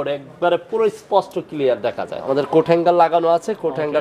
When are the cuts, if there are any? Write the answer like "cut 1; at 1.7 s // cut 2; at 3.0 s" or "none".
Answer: cut 1; at 2.2 s